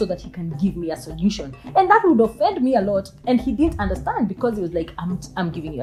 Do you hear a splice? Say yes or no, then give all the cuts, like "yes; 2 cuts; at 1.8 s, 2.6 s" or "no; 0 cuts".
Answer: no; 0 cuts